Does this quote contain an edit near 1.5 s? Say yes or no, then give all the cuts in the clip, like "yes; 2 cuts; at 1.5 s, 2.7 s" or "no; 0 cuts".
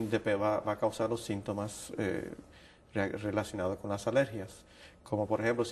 no; 0 cuts